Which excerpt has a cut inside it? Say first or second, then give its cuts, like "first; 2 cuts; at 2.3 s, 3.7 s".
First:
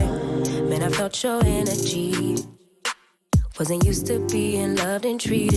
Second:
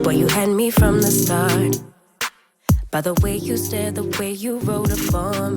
second; 1 cut; at 1.7 s